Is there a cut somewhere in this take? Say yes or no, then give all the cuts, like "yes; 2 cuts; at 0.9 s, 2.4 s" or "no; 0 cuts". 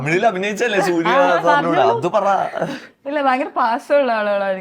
no; 0 cuts